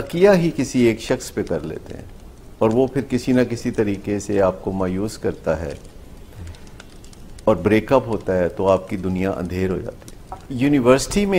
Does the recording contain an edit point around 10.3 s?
yes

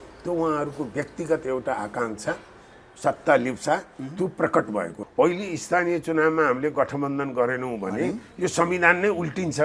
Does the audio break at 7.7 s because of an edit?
no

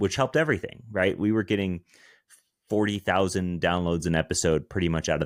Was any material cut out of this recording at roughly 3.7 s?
no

